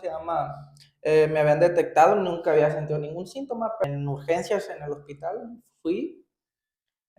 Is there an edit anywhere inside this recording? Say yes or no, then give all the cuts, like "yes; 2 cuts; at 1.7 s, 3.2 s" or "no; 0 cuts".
yes; 1 cut; at 3.8 s